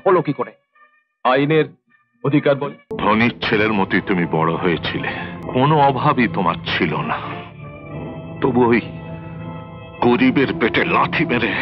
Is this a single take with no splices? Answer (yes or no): no